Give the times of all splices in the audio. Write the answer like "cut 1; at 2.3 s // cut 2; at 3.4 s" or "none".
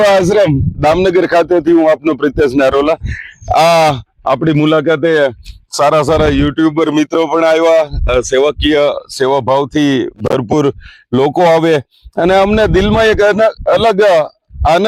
none